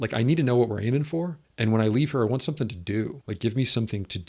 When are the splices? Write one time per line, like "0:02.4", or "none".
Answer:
0:01.4
0:03.2